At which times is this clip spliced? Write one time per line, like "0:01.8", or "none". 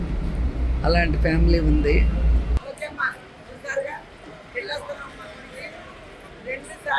0:02.6